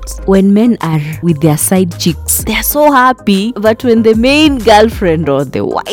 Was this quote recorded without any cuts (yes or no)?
yes